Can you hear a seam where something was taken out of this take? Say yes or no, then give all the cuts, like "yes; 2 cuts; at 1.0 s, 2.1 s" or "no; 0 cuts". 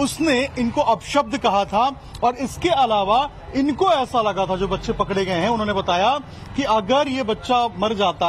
no; 0 cuts